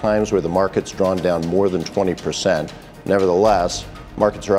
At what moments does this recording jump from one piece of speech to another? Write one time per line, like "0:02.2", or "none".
none